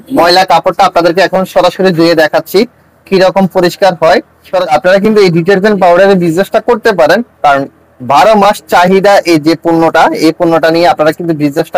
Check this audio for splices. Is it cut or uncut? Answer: cut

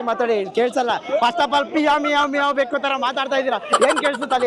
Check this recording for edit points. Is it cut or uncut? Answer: uncut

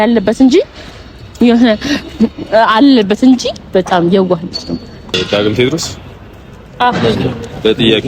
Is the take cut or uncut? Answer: cut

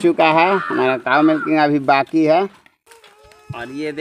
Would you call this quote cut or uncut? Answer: cut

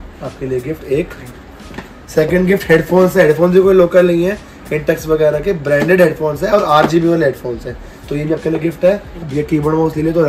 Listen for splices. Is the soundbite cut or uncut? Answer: cut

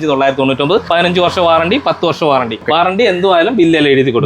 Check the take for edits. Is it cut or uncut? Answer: cut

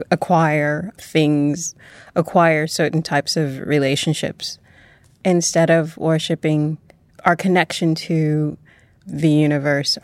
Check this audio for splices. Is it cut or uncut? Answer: cut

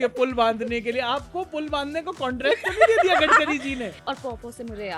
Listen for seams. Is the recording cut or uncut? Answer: cut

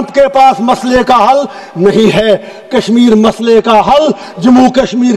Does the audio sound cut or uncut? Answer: uncut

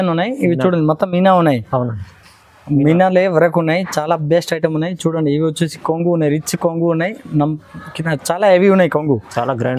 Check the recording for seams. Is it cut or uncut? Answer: uncut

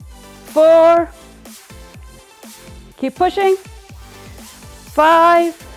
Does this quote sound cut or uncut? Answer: cut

